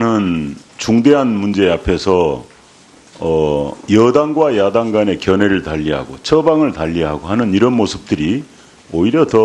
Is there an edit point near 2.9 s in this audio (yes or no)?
no